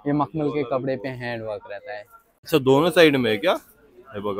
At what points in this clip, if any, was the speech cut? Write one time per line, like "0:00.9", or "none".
0:02.5